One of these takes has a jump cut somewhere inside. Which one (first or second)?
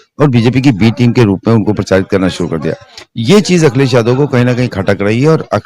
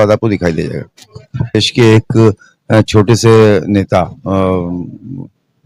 second